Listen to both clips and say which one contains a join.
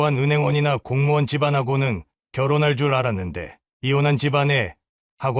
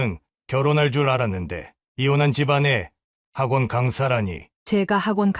second; 1 cut; at 4.5 s

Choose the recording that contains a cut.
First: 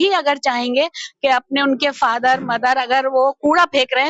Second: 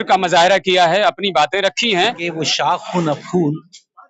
second; 1 cut; at 2.2 s

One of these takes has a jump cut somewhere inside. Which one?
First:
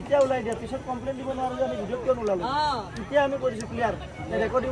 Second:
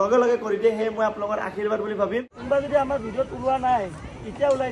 second; 1 cut; at 2.4 s

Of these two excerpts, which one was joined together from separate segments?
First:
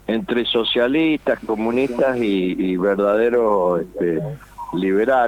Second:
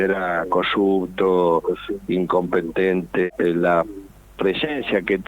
second; 1 cut; at 3.3 s

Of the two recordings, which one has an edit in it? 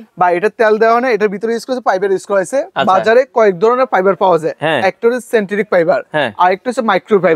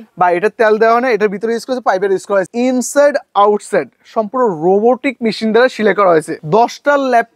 second; 2 cuts; at 2.5 s, 6.4 s

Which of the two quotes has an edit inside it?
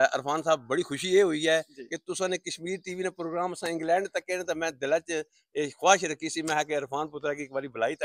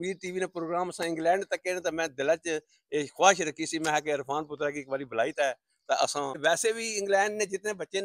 second; 1 cut; at 6.4 s

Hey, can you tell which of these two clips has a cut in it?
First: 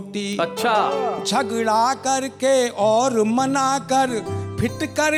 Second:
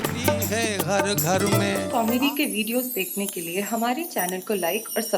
second; 1 cut; at 1.8 s

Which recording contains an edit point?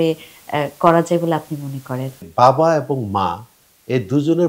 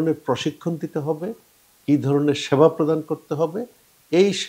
first; 1 cut; at 2.2 s

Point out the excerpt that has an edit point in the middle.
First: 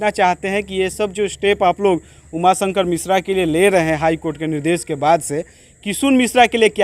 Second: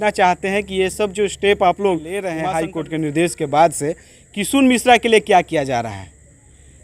second; 1 cut; at 2.3 s

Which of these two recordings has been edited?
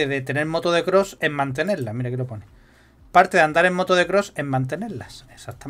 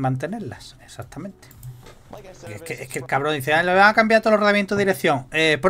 second; 1 cut; at 2.5 s

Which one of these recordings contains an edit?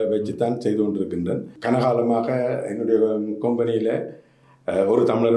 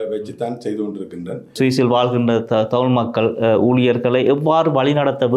second; 1 cut; at 1.5 s

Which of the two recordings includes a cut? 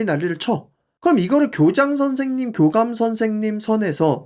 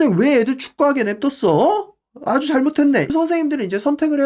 second; 1 cut; at 3.1 s

